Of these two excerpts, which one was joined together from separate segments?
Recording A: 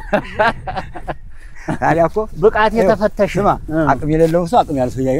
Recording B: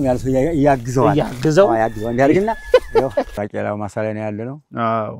B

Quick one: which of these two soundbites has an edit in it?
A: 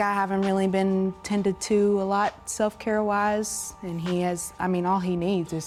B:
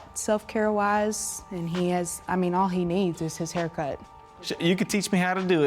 B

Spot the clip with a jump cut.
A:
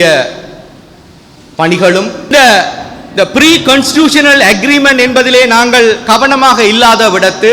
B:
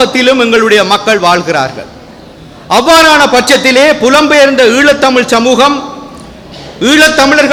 A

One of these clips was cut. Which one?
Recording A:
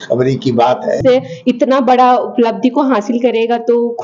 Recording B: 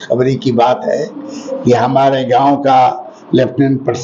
A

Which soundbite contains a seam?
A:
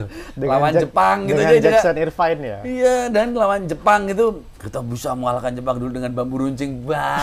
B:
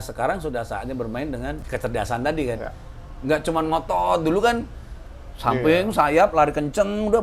B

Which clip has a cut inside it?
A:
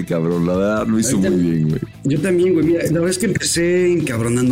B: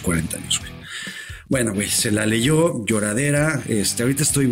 A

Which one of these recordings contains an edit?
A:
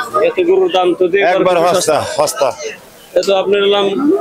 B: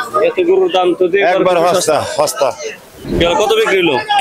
B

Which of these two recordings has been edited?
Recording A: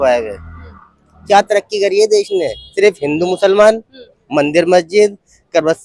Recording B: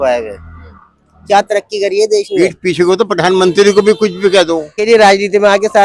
B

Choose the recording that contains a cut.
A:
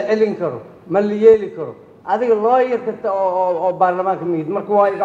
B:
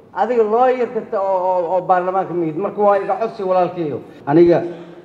B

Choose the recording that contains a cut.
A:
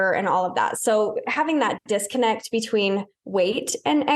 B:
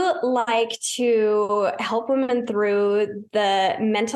A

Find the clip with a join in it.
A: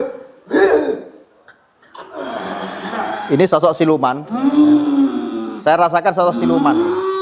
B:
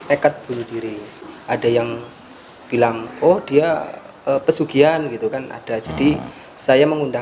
B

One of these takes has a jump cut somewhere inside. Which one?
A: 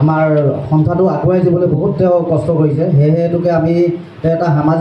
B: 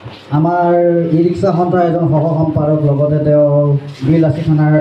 B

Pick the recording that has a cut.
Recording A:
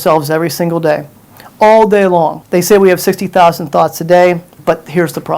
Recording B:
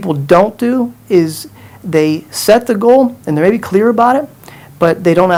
A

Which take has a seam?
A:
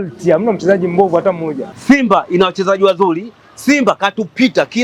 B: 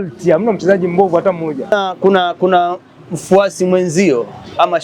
A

